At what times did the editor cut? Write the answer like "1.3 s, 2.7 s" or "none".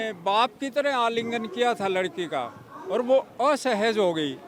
none